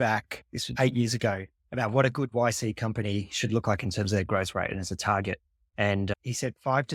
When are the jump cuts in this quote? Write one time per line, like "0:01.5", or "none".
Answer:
none